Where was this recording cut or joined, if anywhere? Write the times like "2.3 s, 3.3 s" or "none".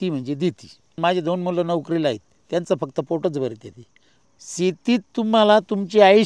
0.9 s, 4.1 s